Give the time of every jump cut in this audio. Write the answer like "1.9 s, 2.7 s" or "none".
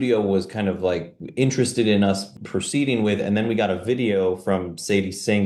none